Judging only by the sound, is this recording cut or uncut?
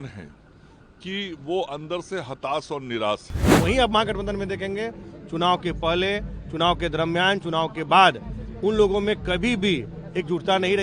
cut